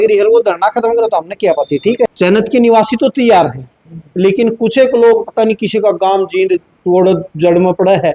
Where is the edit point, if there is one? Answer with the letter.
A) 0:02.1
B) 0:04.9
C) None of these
A